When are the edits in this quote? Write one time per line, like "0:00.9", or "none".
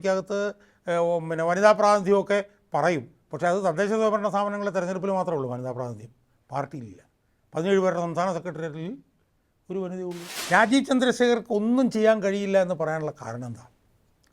0:10.3